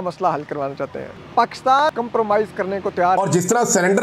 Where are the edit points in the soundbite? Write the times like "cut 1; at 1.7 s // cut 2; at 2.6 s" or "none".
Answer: cut 1; at 1.9 s // cut 2; at 3.2 s